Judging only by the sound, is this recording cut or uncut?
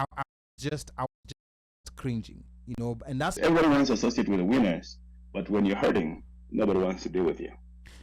cut